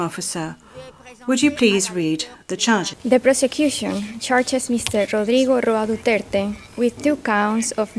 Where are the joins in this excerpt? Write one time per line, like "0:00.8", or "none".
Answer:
0:02.9